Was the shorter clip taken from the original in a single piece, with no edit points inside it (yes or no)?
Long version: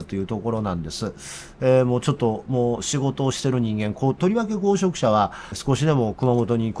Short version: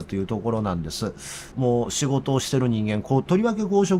no